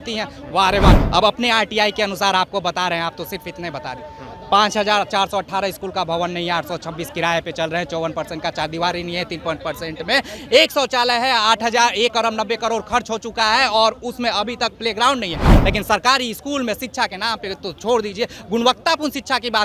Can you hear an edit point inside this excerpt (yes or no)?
yes